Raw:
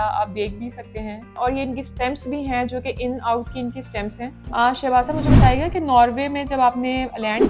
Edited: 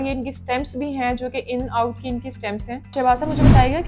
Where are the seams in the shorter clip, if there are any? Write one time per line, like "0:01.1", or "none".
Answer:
0:02.9